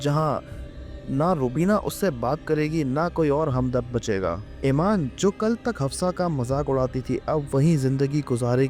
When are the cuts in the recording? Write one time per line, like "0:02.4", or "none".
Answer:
0:04.5
0:05.1